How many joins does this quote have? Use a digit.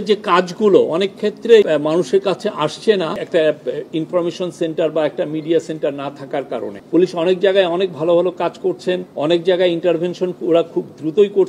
4